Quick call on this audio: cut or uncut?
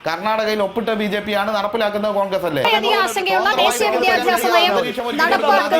cut